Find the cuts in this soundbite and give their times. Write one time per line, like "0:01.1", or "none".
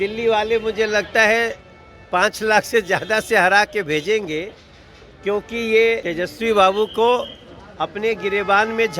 0:06.1

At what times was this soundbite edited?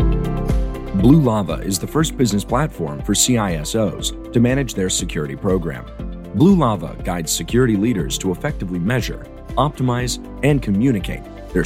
0:00.9

